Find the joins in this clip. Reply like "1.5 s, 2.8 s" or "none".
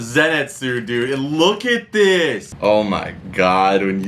2.5 s